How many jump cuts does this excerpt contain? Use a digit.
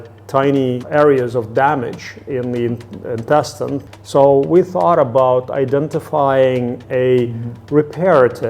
3